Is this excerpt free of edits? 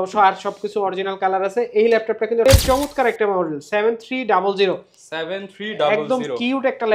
no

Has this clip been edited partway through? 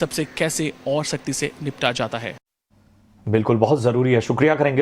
yes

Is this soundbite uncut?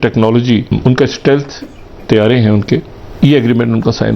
no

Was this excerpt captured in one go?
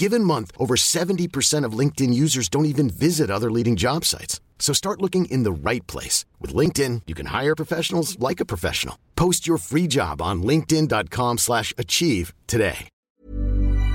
no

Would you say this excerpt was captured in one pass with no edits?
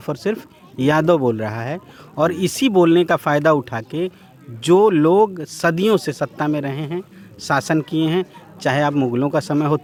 yes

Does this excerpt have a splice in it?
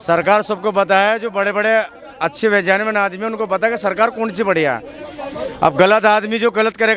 no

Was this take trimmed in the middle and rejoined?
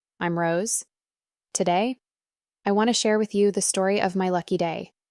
no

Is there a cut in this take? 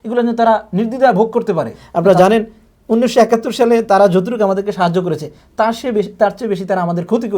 yes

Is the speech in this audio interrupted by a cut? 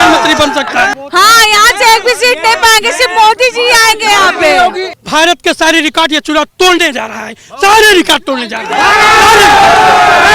yes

